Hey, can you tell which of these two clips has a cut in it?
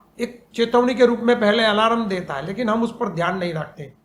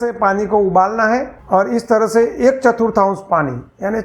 second; 1 cut; at 1.3 s

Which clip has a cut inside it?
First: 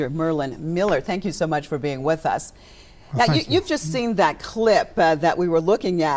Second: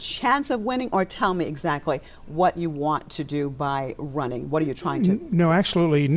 second; 1 cut; at 3.0 s

